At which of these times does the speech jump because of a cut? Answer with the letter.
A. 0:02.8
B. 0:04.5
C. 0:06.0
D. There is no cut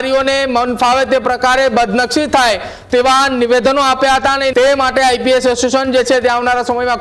B